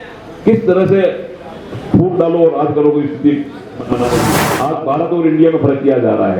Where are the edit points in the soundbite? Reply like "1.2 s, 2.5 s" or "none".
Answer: 4.5 s